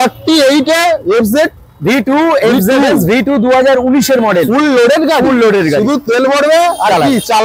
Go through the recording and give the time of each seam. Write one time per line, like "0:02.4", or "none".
none